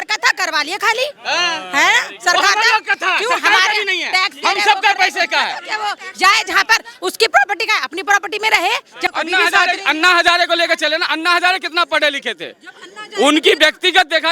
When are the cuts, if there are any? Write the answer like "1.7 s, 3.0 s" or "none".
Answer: 9.1 s